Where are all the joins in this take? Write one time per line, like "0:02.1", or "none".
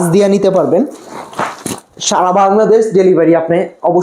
none